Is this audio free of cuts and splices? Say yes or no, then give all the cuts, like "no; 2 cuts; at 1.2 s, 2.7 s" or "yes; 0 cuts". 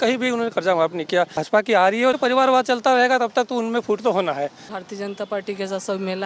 no; 3 cuts; at 1.4 s, 2.2 s, 4.6 s